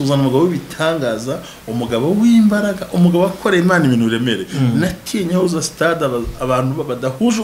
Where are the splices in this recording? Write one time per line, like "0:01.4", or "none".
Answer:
none